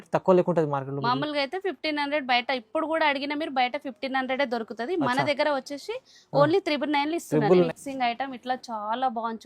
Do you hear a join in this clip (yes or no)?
yes